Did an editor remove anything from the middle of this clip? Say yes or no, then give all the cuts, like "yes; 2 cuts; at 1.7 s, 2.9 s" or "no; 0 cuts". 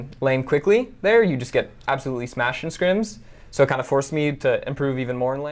no; 0 cuts